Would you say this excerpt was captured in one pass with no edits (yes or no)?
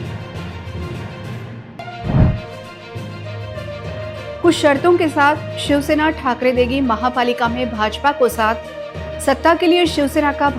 no